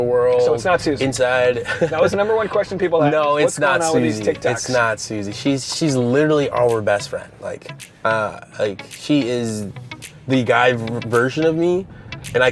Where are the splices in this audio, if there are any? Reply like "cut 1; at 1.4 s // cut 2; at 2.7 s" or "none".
none